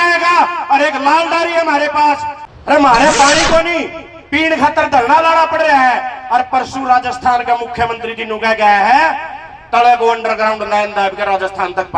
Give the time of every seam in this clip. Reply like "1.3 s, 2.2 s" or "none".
2.4 s